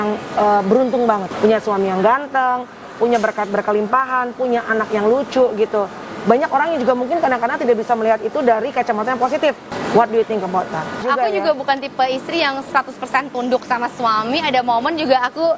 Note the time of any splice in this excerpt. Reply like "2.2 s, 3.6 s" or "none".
1.3 s, 9.7 s, 11.0 s